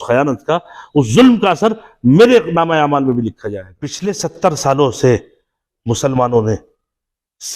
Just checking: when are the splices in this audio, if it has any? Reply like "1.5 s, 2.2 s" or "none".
4.0 s